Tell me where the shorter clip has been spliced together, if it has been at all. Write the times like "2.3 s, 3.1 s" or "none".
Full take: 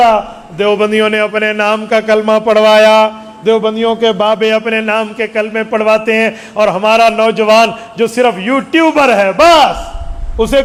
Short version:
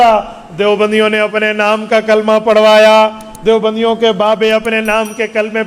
none

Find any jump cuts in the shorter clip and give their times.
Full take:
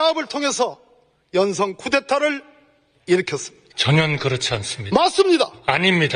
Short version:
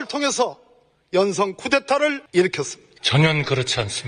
2.2 s

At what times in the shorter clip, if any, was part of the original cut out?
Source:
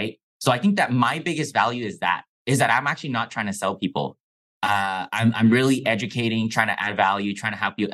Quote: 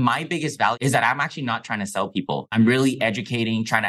0.8 s, 2.5 s

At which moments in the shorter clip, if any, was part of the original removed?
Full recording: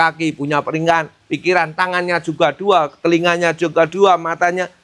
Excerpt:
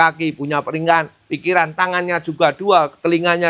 none

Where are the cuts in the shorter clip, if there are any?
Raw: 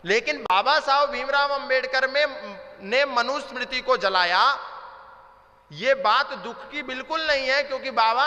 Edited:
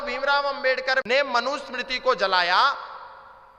1.0 s

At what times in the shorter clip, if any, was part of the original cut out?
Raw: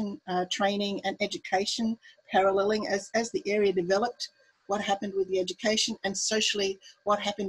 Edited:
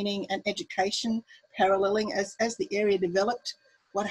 none

